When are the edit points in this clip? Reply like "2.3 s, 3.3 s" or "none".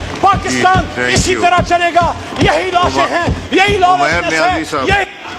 none